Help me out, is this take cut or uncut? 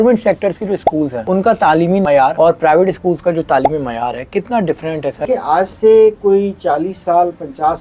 cut